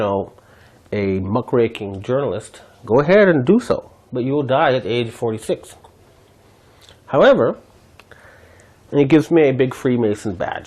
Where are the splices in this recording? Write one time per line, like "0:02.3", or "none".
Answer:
none

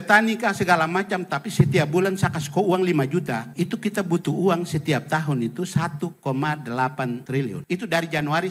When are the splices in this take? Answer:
0:03.5
0:07.4

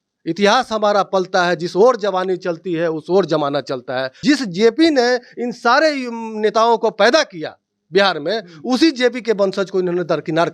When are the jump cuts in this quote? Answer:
0:04.1

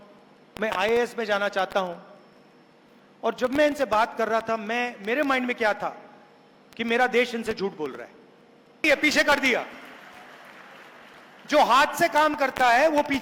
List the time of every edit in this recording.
0:08.8

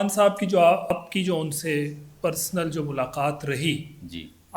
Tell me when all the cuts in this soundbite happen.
0:00.9

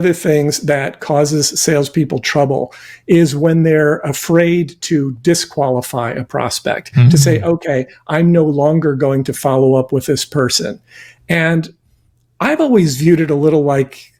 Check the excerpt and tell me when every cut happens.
none

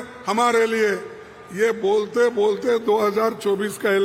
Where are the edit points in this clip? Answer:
none

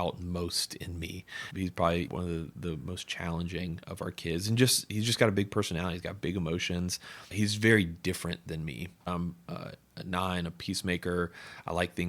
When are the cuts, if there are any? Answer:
0:09.1

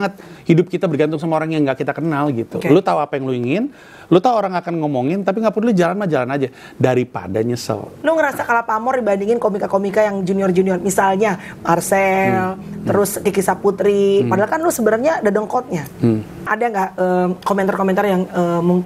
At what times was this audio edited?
0:07.9
0:16.5

